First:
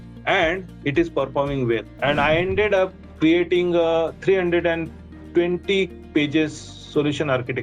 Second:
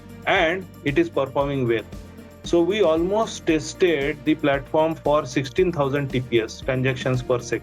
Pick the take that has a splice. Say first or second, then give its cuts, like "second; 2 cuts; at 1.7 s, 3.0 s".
first; 1 cut; at 1.9 s